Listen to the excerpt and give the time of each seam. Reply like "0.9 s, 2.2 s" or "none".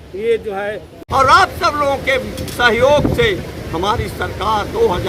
1.1 s